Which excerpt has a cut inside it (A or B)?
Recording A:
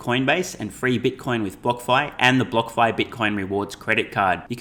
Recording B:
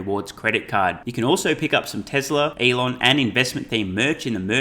B